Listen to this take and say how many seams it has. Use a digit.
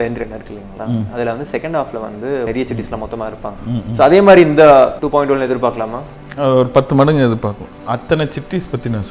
3